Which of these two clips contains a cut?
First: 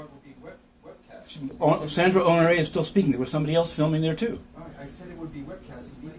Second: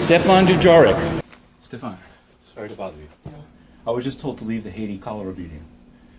second; 1 cut; at 1.2 s

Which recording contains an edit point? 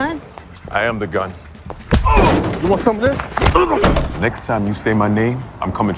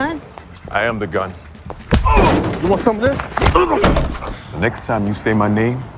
first; 1 cut; at 4.1 s

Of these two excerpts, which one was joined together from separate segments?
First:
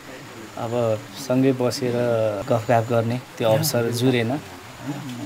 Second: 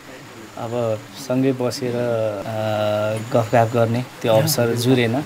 first; 1 cut; at 2.4 s

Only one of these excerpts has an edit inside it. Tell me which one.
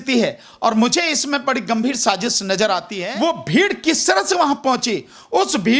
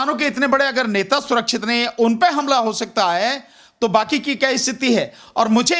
first; 1 cut; at 3.0 s

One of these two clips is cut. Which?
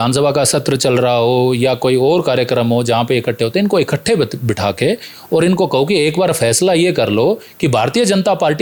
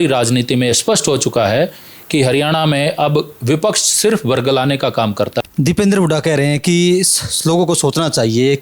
second; 1 cut; at 5.4 s

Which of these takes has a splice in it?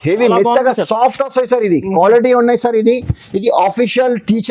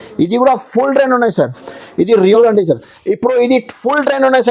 second; 1 cut; at 2.4 s

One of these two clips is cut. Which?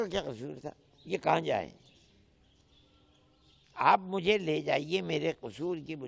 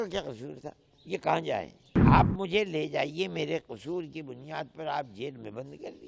second; 1 cut; at 1.8 s

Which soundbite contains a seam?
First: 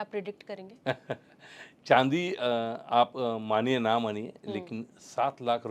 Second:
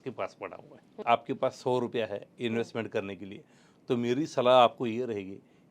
second; 1 cut; at 1.0 s

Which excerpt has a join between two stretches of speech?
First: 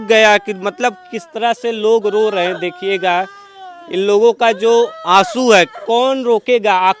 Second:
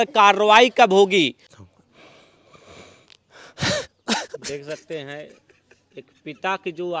second; 1 cut; at 1.4 s

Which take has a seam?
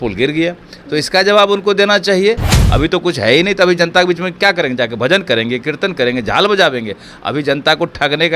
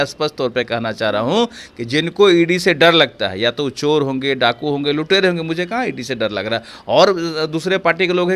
first; 1 cut; at 2.6 s

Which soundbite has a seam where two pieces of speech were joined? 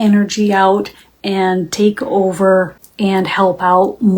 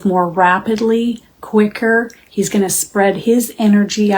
first; 1 cut; at 2.8 s

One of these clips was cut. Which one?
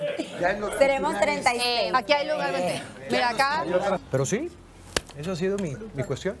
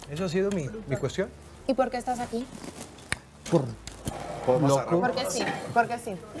first; 1 cut; at 4.0 s

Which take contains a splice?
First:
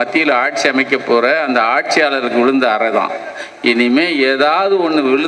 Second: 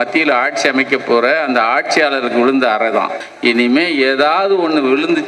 second; 1 cut; at 3.2 s

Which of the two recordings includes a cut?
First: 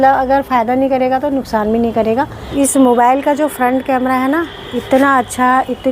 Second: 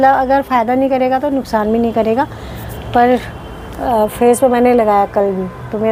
first; 1 cut; at 2.4 s

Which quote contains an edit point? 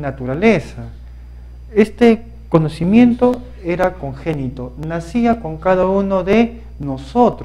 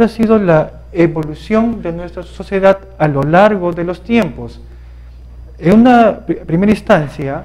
second; 1 cut; at 4.2 s

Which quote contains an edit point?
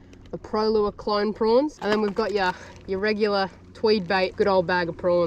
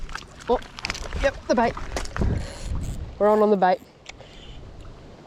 first; 2 cuts; at 1.8 s, 4.3 s

